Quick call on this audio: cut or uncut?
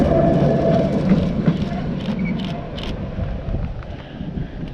cut